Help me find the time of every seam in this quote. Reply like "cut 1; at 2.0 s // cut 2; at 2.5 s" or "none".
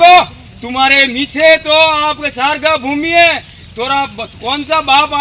none